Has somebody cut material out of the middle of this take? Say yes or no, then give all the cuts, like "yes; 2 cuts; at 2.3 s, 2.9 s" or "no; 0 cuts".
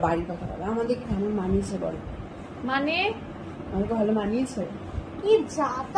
no; 0 cuts